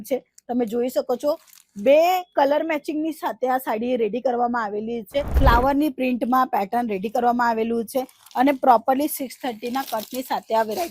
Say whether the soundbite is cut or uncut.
cut